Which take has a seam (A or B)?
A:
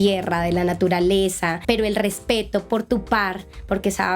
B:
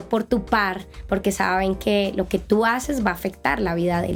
A